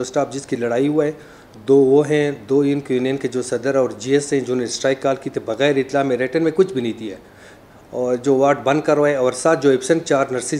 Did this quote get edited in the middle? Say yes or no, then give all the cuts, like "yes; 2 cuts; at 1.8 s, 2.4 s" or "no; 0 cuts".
no; 0 cuts